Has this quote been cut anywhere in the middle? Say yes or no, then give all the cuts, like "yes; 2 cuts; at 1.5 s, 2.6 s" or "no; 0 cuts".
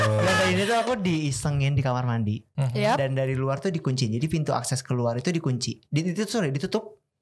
yes; 1 cut; at 2.5 s